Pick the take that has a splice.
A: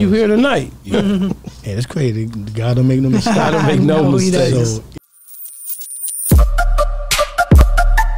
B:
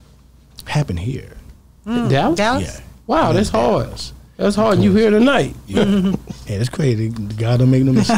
A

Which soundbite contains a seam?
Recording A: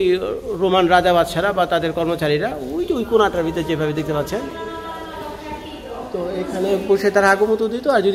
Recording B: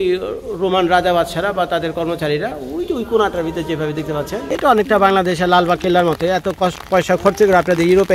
B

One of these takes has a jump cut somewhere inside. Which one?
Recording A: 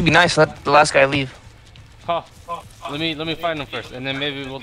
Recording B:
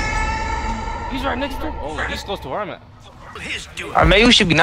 B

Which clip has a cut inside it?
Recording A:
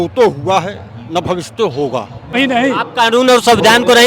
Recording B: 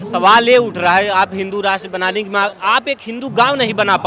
A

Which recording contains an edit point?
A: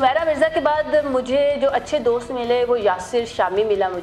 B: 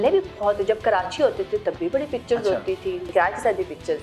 B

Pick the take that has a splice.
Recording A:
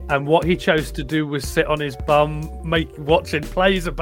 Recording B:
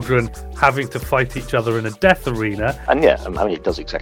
B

